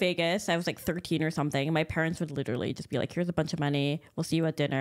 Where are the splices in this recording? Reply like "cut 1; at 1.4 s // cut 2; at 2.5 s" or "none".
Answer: none